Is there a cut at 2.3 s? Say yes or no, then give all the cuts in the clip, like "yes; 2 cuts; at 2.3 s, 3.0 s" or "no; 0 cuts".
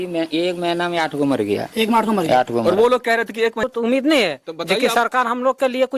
no; 1 cut; at 3.7 s